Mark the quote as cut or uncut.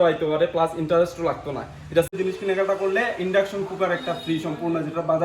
cut